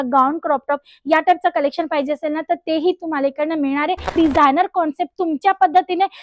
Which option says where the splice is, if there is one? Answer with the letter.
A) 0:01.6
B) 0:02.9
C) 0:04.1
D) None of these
C